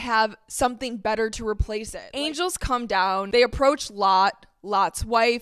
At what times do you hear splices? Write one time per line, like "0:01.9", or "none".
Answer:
0:02.0
0:03.3